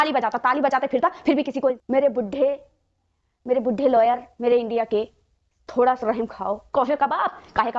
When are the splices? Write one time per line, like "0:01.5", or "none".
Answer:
0:01.8
0:06.6